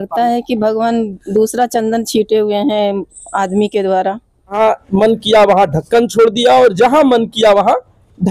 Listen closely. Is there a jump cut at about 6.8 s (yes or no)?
no